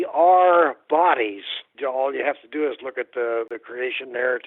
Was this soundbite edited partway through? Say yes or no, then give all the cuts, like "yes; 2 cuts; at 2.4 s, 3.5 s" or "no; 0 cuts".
yes; 2 cuts; at 1.7 s, 3.6 s